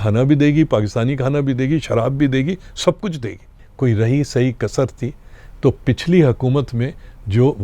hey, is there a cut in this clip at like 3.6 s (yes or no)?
yes